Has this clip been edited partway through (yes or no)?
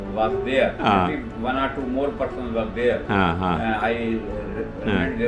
no